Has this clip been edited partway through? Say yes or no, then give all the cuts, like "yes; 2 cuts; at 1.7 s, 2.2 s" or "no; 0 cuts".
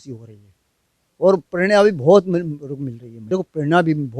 yes; 1 cut; at 3.3 s